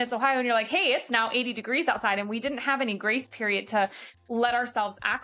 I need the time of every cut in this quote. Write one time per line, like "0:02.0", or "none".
none